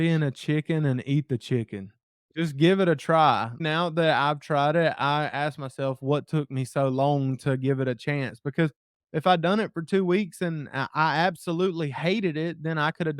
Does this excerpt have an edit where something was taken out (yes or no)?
yes